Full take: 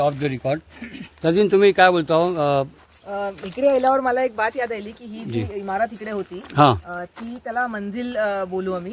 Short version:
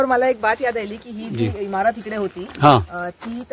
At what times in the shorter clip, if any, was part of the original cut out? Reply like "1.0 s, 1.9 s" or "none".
none